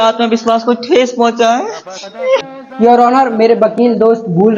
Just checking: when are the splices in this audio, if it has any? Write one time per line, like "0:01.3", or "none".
0:02.5